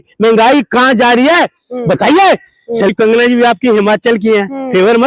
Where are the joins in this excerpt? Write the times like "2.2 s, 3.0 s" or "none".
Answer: 2.9 s